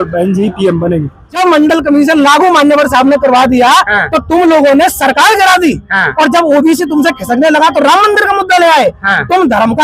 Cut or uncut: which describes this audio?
cut